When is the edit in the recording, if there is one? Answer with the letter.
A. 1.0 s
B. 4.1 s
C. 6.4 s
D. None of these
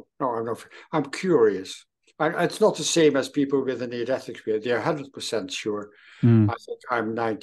D